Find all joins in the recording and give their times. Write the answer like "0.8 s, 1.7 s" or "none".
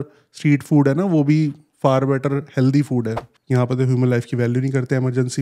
3.3 s